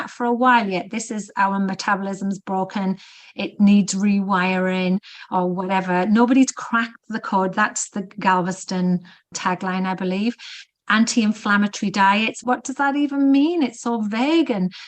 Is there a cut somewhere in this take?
yes; 1 cut; at 12.4 s

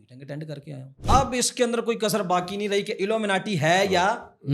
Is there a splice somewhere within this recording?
yes; 1 cut; at 1.0 s

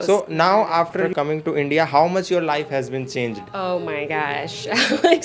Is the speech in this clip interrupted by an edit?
yes; 1 cut; at 1.0 s

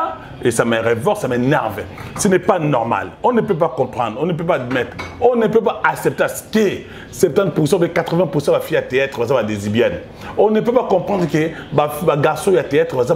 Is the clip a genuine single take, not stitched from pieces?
yes; 0 cuts

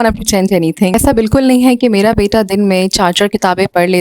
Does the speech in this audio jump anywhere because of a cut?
yes; 1 cut; at 0.9 s

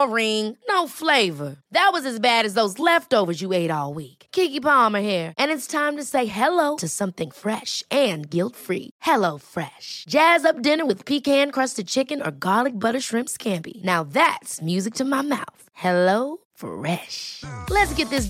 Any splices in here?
no; 0 cuts

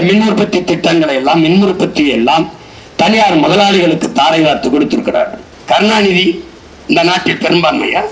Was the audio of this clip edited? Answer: yes; 1 cut; at 5.5 s

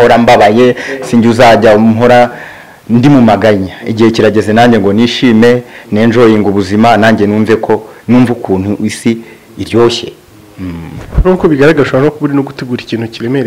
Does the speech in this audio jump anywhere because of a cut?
no; 0 cuts

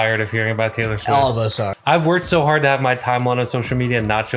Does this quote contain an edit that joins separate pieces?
yes; 1 cut; at 1.7 s

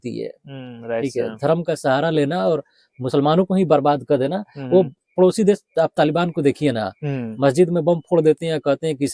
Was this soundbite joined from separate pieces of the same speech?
no; 0 cuts

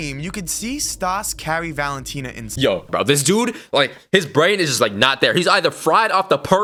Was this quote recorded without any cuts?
yes; 0 cuts

